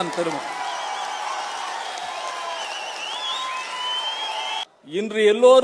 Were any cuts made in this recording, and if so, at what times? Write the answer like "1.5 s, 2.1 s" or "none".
4.6 s

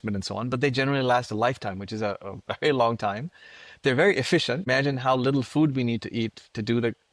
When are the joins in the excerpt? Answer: 4.7 s

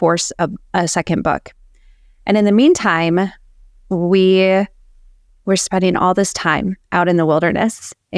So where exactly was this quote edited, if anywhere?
none

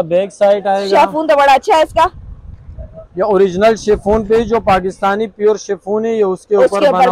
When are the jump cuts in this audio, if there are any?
none

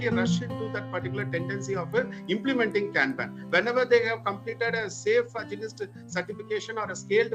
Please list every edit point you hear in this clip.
none

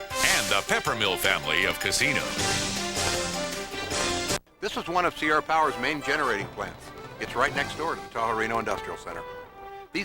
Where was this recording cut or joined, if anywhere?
4.4 s

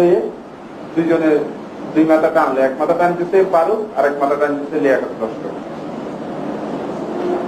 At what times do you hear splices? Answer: none

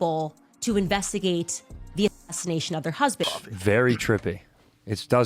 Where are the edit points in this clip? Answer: 3.4 s

